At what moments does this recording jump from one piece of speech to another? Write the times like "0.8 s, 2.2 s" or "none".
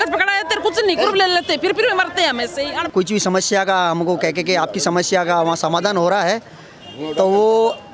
2.9 s